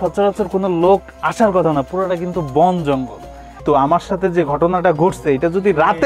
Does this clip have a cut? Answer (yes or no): yes